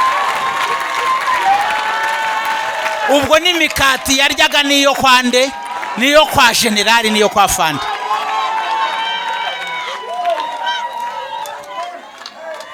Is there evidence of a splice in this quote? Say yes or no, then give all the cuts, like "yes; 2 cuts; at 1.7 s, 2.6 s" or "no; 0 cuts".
no; 0 cuts